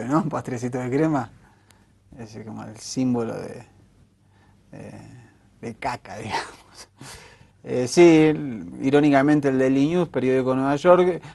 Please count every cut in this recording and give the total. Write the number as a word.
one